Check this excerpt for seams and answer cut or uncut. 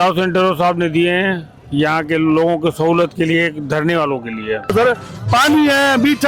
cut